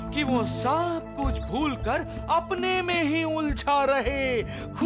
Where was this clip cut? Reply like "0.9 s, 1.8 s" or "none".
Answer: none